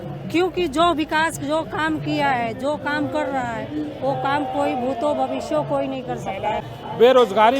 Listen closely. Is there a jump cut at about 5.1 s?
no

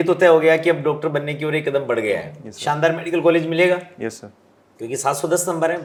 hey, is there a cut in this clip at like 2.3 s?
no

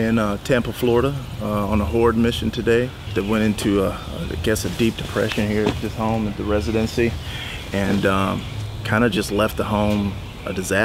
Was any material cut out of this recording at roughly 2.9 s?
no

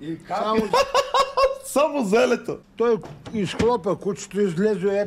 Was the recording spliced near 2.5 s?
yes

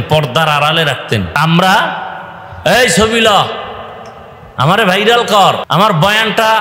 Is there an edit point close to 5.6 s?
yes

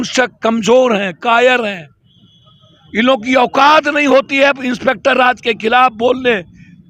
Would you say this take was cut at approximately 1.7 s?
no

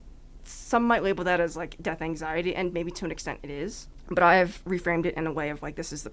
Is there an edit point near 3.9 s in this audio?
yes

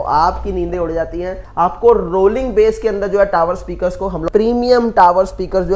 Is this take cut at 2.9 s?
no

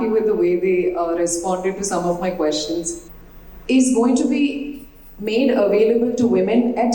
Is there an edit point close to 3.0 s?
yes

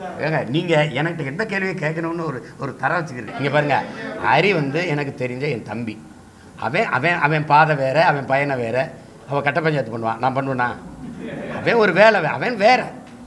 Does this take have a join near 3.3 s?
yes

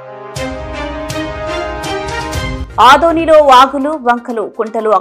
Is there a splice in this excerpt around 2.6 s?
yes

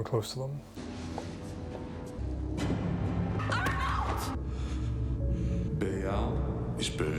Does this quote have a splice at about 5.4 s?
no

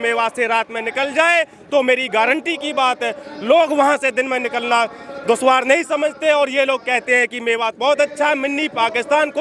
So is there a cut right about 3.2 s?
no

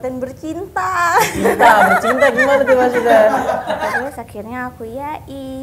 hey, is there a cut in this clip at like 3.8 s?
yes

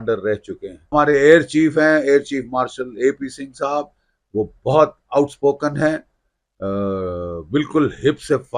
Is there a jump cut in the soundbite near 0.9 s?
yes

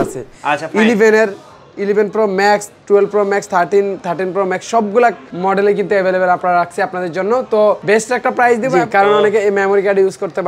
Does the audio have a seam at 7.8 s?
yes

